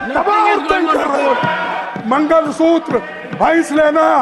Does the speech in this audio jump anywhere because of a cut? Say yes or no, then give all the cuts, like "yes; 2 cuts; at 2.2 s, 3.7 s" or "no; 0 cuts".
yes; 1 cut; at 1.8 s